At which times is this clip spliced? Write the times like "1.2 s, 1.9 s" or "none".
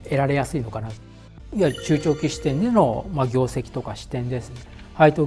1.2 s